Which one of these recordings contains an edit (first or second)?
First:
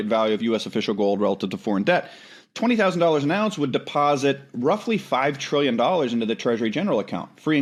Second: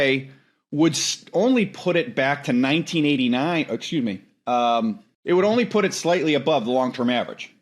second